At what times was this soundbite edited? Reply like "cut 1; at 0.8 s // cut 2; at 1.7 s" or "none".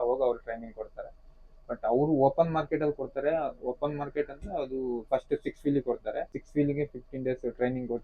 cut 1; at 6.3 s